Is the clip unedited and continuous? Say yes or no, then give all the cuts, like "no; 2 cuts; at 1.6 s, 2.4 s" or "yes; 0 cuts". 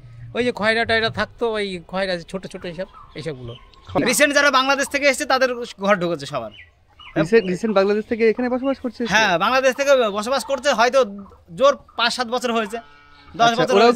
no; 1 cut; at 4.0 s